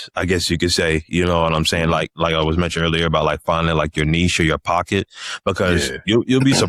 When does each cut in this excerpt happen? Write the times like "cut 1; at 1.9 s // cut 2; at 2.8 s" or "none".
none